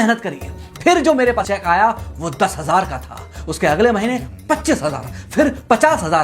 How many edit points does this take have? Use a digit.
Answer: 1